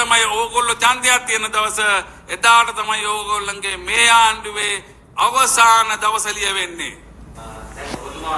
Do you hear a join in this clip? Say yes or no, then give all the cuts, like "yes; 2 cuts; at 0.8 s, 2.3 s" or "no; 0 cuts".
no; 0 cuts